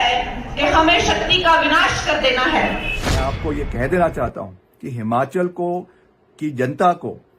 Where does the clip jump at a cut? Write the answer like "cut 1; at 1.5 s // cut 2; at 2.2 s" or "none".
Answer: cut 1; at 3.3 s